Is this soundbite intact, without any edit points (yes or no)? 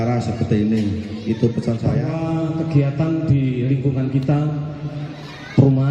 no